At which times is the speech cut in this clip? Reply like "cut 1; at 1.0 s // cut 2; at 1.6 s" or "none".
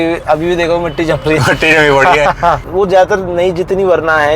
cut 1; at 2.6 s

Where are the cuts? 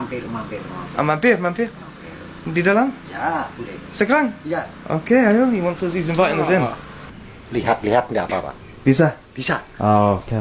none

